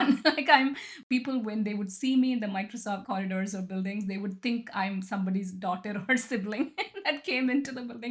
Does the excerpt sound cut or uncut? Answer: cut